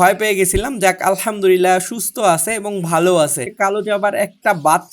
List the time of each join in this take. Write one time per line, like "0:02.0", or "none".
0:03.5